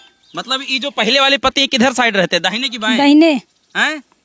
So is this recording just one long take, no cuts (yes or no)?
yes